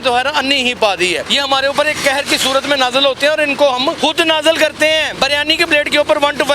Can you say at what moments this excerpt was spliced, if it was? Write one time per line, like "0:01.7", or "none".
0:01.3
0:04.0
0:05.1